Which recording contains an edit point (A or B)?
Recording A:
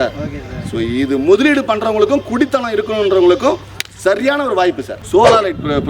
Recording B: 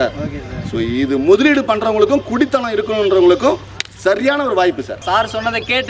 A